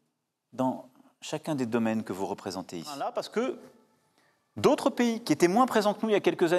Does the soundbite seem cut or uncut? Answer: cut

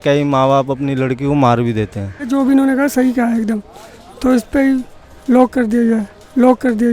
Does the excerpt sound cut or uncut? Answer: cut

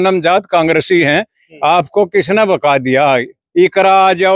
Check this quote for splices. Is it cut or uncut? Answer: uncut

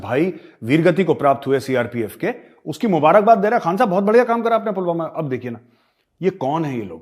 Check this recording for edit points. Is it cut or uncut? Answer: uncut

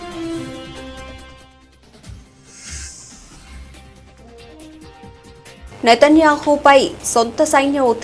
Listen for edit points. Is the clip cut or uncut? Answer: uncut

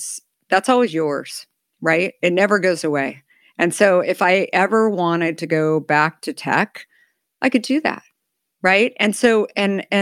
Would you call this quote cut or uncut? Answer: uncut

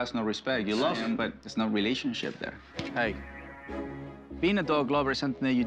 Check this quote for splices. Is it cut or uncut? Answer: cut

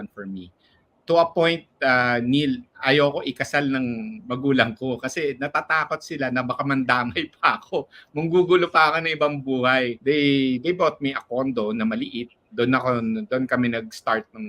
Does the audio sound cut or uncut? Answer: cut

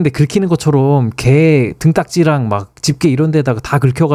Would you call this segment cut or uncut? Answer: uncut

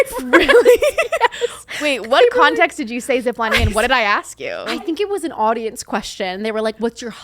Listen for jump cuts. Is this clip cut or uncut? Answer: cut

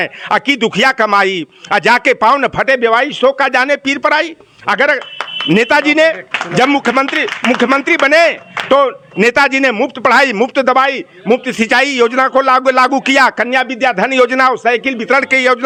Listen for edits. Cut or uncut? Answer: uncut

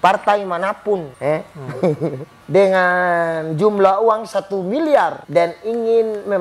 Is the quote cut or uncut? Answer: cut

